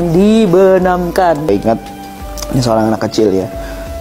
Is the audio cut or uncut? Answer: cut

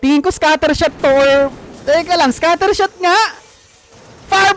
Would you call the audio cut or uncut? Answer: uncut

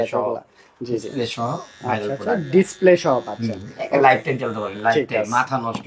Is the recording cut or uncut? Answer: uncut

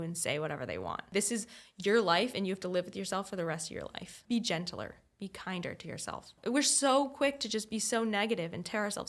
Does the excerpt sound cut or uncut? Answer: cut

